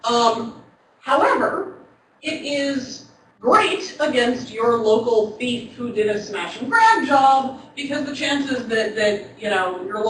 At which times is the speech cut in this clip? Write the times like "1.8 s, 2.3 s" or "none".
7.9 s